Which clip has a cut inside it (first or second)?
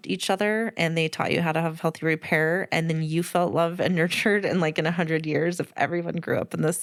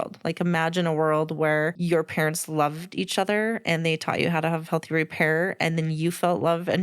second